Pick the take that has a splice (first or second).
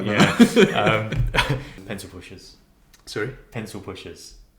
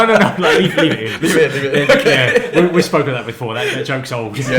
first